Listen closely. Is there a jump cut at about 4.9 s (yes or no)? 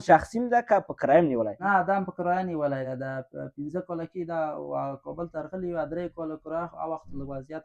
no